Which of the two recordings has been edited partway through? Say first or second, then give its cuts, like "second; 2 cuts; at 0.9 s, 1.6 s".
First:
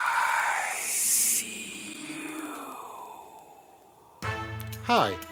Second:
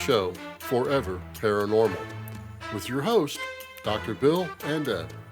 second; 1 cut; at 1.2 s